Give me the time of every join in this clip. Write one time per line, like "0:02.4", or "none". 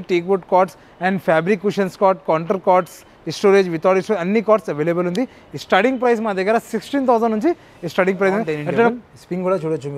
0:08.9